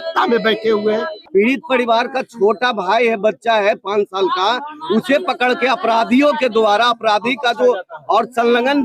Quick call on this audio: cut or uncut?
cut